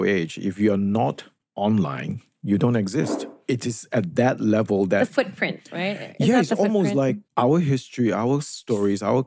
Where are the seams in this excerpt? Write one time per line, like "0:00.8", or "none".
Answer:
0:03.4